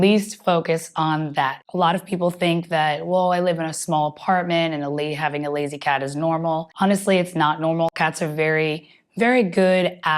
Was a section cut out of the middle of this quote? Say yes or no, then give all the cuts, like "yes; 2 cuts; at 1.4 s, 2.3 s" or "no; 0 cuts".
yes; 2 cuts; at 1.6 s, 6.7 s